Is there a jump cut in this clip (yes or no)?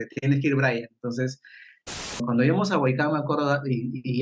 yes